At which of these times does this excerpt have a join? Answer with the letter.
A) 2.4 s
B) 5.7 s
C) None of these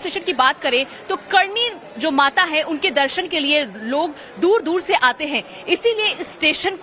C